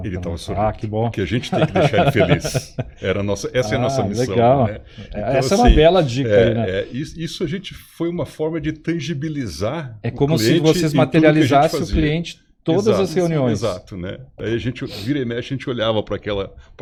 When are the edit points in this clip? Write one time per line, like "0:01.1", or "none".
none